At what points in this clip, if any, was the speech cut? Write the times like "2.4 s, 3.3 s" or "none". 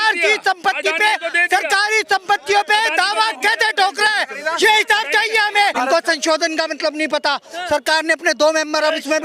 5.7 s